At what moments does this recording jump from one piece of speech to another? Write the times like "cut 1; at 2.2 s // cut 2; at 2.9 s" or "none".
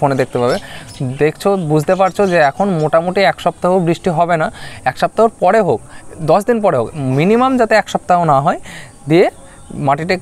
none